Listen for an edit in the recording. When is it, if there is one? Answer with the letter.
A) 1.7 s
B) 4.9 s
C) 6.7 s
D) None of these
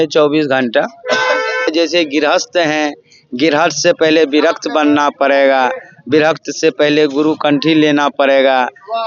A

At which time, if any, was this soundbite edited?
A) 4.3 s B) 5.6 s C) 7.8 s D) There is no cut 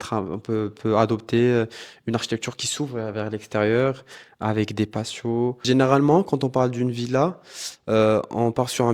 B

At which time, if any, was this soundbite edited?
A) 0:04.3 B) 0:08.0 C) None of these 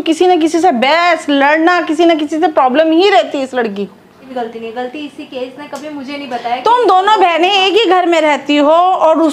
A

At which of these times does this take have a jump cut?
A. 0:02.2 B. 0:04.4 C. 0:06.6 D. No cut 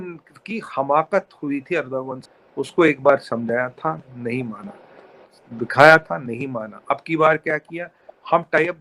A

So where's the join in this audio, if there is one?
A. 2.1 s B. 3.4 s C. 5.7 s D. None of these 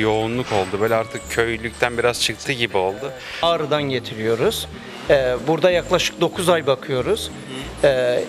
B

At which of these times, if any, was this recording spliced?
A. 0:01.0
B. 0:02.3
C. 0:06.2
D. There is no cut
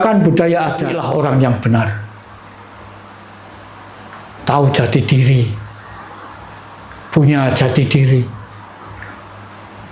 A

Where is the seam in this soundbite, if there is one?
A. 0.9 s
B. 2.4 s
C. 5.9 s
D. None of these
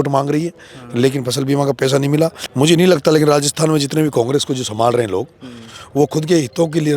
B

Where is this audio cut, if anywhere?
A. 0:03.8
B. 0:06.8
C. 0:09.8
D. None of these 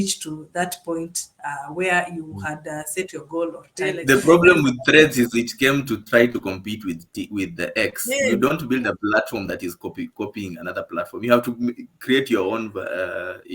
A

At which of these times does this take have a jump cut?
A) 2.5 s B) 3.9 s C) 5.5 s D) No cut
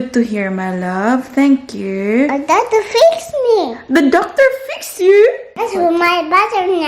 C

